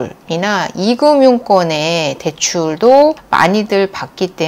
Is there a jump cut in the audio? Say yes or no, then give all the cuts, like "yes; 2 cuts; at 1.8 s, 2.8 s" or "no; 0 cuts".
no; 0 cuts